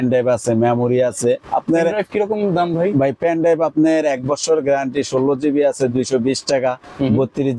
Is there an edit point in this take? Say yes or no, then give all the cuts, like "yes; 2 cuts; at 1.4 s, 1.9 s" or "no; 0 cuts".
no; 0 cuts